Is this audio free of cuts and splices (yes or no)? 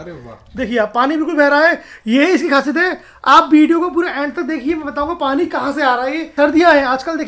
no